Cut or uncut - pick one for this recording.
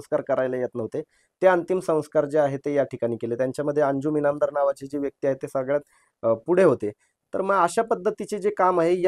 uncut